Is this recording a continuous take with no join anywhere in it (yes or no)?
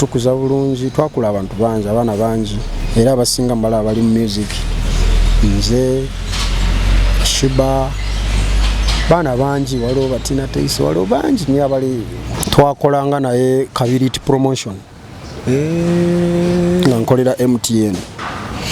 no